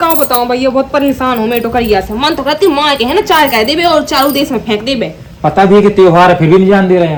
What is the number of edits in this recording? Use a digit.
0